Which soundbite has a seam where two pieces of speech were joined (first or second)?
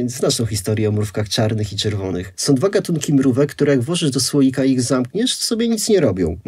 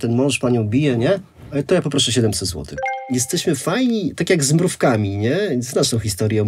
second